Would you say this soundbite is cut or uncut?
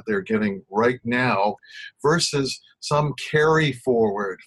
cut